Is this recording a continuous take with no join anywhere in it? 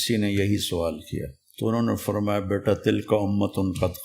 no; 1 cut; at 1.4 s

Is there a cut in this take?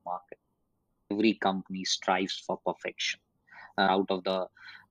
yes; 2 cuts; at 1.1 s, 3.9 s

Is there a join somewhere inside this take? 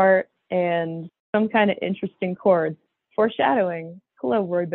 no; 0 cuts

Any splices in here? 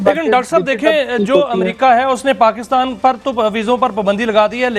no; 0 cuts

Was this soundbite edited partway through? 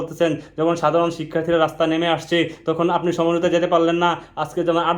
no; 0 cuts

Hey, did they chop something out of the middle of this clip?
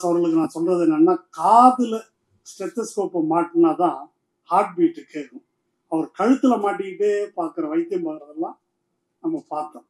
no; 0 cuts

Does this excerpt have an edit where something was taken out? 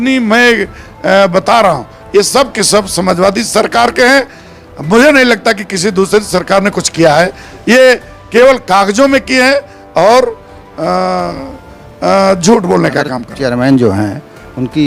yes; 1 cut; at 13.2 s

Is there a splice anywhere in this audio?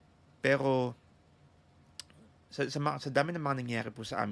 no; 0 cuts

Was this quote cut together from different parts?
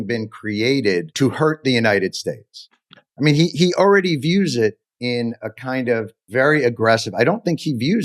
yes; 3 cuts; at 1.1 s, 4.9 s, 6.2 s

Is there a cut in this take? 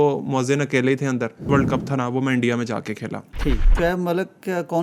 yes; 2 cuts; at 1.5 s, 3.7 s

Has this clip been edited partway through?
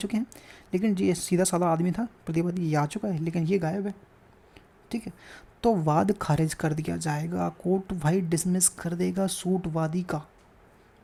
no; 0 cuts

